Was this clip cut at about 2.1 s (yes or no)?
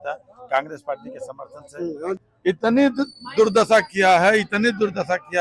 yes